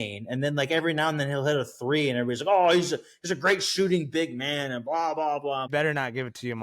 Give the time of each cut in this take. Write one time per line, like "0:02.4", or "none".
0:05.7